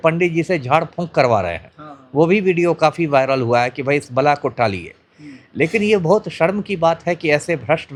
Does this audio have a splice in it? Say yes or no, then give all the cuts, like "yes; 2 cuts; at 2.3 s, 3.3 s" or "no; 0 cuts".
no; 0 cuts